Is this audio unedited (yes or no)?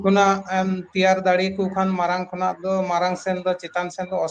yes